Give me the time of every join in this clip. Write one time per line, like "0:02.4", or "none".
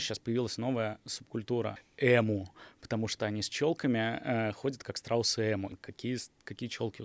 0:01.8
0:05.7